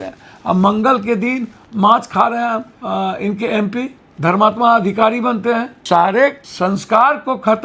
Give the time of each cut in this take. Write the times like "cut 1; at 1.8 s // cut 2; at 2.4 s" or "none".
cut 1; at 2.7 s // cut 2; at 4.0 s // cut 3; at 5.7 s // cut 4; at 6.4 s